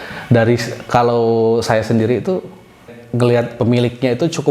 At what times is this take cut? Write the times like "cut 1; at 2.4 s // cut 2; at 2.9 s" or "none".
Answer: cut 1; at 2.9 s